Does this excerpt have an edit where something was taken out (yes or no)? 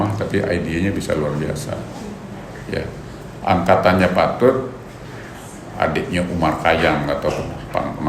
no